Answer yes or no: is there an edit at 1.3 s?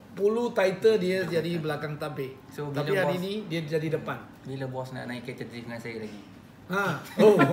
no